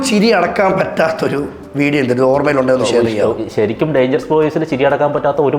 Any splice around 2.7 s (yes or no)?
no